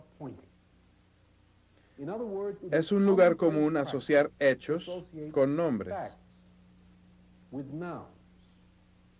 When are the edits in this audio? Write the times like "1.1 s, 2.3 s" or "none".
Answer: 7.8 s